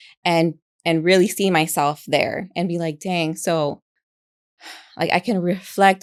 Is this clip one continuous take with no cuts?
yes; 0 cuts

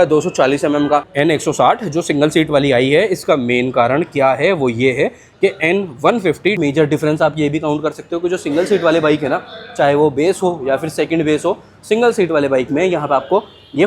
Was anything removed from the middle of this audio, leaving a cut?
yes; 2 cuts; at 1.1 s, 6.6 s

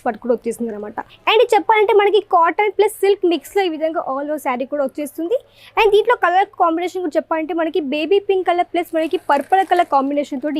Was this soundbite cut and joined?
yes; 1 cut; at 1.0 s

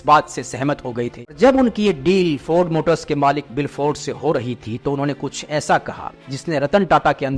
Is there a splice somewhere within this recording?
yes; 1 cut; at 1.4 s

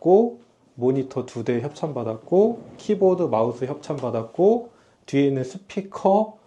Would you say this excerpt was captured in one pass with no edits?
yes; 0 cuts

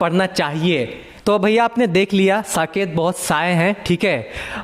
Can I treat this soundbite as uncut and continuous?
no; 1 cut; at 1.0 s

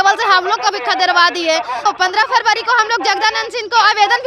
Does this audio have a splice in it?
yes; 1 cut; at 1.8 s

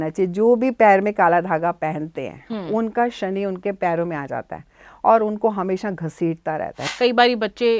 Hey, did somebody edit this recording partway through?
yes; 1 cut; at 6.8 s

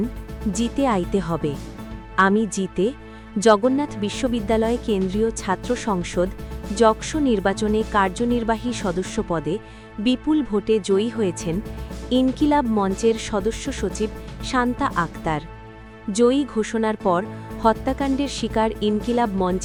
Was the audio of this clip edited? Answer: no; 0 cuts

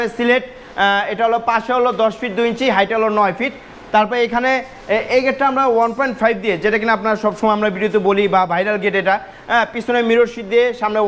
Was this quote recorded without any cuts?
yes; 0 cuts

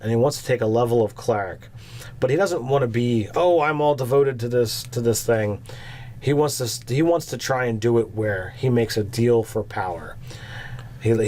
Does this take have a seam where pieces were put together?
yes; 1 cut; at 7.7 s

